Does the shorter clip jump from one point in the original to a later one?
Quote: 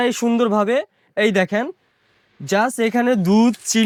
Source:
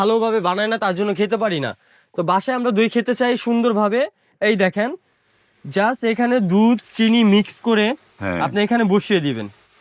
no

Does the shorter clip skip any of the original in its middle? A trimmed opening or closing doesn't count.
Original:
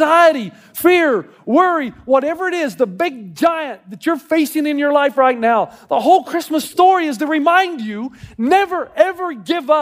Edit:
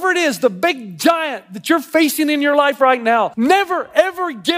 yes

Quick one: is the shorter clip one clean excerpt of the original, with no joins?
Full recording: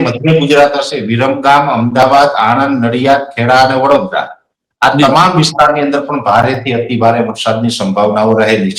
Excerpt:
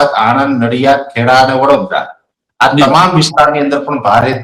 yes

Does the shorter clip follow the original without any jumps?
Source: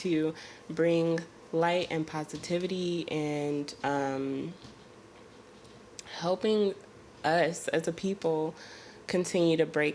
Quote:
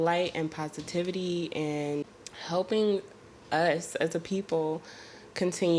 no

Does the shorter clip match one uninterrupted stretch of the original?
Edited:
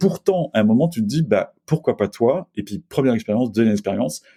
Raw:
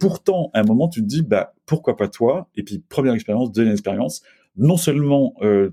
yes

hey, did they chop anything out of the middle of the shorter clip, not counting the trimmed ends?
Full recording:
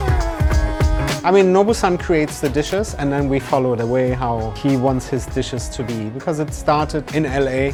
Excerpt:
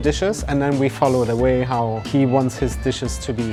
no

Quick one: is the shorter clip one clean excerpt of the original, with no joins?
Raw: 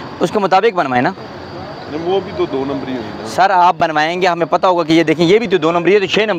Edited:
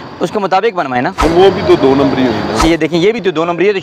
no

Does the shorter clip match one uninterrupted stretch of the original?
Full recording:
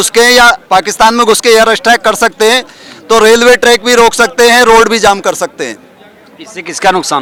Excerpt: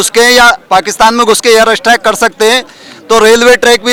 yes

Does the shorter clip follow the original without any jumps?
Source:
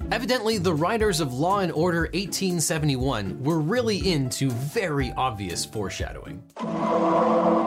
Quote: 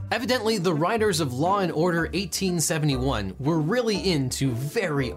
yes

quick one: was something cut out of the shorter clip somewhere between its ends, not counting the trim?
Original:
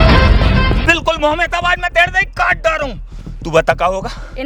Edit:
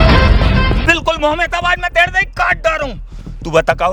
no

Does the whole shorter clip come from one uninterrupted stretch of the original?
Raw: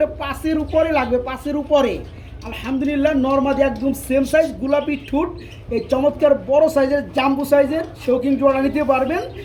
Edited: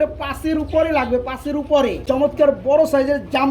no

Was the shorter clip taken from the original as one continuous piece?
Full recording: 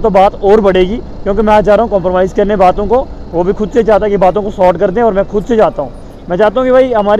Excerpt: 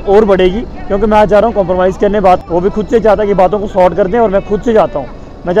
no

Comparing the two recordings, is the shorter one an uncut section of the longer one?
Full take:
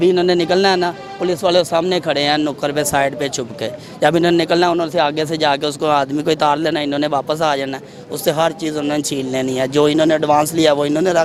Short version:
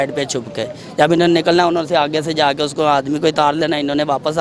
yes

